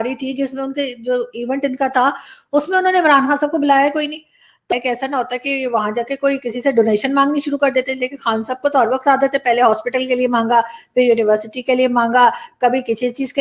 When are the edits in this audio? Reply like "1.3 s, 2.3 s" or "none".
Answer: 4.7 s